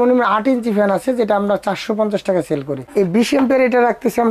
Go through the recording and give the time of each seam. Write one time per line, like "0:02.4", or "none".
0:02.2